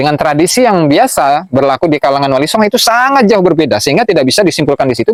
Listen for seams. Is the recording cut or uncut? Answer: uncut